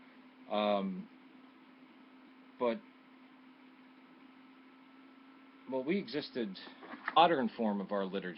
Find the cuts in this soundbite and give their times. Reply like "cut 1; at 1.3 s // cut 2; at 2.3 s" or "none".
none